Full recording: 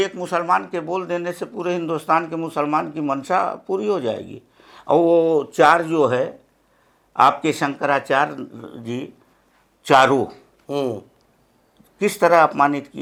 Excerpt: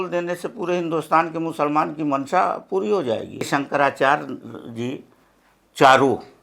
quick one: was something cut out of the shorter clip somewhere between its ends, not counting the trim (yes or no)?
yes